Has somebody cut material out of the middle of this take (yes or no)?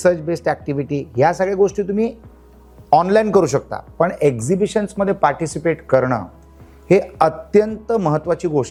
no